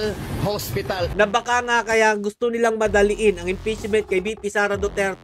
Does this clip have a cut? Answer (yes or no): yes